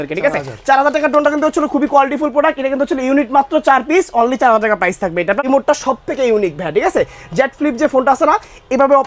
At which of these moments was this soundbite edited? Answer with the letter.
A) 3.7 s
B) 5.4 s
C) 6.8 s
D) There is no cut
B